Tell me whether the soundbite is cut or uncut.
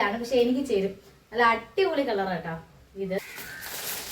cut